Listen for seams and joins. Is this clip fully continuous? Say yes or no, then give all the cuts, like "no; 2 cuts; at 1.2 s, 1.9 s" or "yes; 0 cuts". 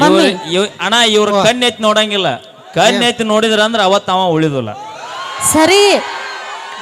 yes; 0 cuts